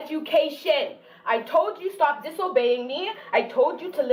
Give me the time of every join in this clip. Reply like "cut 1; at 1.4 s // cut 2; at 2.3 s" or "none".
none